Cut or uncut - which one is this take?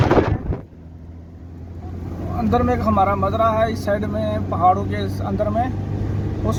uncut